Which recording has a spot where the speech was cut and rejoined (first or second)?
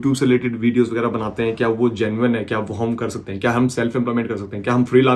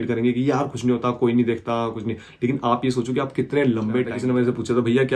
second